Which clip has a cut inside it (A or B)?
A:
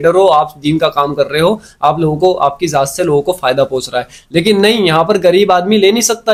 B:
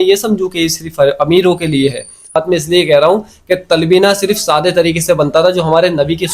B